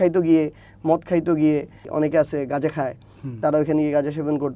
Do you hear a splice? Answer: yes; 1 cut; at 1.9 s

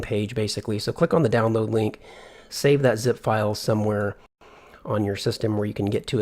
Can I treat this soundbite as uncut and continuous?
no; 1 cut; at 3.0 s

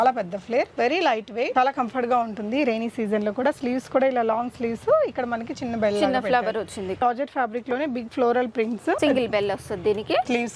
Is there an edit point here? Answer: yes; 2 cuts; at 1.5 s, 7.0 s

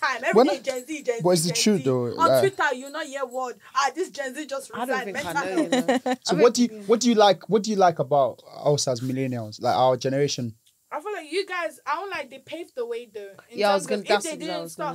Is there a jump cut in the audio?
no; 0 cuts

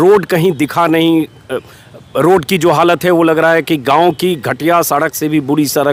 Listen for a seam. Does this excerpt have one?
no; 0 cuts

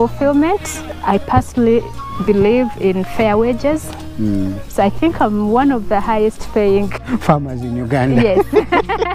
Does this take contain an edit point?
yes; 2 cuts; at 0.9 s, 7.0 s

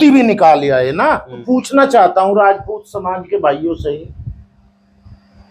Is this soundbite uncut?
no; 1 cut; at 1.3 s

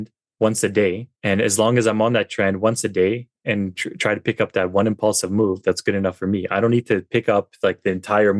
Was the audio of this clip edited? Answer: yes; 1 cut; at 1.1 s

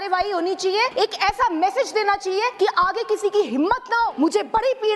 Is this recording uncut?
no; 3 cuts; at 0.9 s, 2.5 s, 4.1 s

